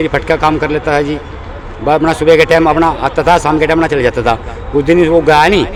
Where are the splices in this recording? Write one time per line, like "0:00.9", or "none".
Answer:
none